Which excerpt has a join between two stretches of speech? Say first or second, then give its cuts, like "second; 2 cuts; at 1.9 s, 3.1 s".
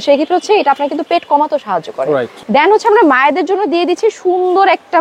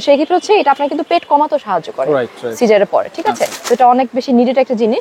first; 1 cut; at 2.3 s